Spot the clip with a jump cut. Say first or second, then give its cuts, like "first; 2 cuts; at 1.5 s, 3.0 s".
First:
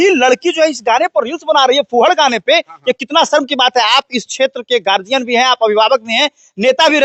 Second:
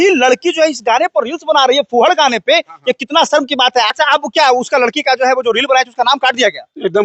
second; 1 cut; at 3.9 s